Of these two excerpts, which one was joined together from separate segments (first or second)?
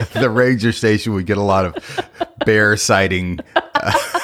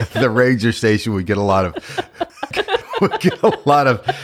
second